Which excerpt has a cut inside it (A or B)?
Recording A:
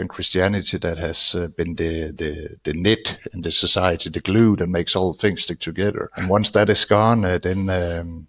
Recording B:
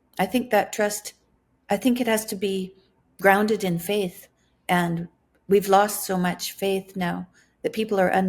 A